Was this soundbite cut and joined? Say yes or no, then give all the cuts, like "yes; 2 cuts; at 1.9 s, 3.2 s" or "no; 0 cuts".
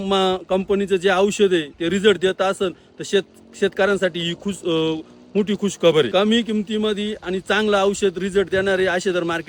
yes; 1 cut; at 6.1 s